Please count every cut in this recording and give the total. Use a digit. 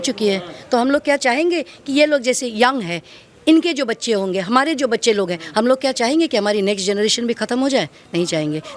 0